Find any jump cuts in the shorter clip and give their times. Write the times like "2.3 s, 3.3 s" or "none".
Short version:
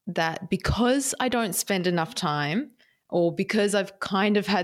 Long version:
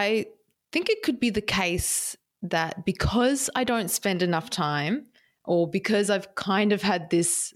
none